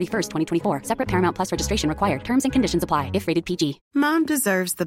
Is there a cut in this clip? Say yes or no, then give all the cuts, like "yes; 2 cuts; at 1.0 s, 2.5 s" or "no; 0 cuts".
yes; 1 cut; at 3.8 s